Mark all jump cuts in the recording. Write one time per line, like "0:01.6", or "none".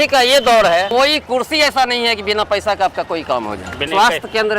0:00.9
0:03.9